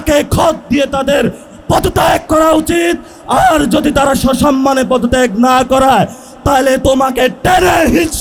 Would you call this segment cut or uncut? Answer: uncut